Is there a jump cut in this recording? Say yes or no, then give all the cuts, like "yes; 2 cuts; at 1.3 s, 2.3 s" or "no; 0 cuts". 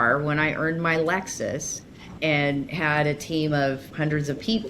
yes; 2 cuts; at 2.2 s, 3.9 s